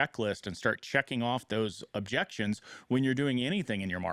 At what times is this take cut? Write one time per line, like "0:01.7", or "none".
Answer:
none